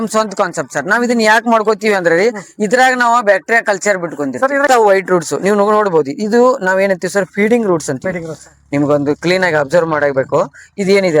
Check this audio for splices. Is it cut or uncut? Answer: cut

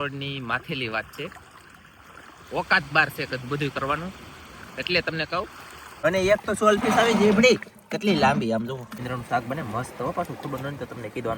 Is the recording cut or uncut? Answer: cut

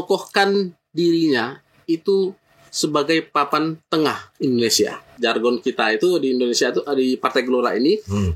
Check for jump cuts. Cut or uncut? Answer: cut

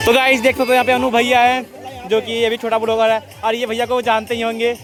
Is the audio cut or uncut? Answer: uncut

